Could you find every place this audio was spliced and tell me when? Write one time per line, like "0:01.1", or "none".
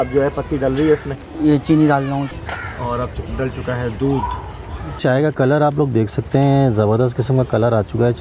0:01.2
0:02.3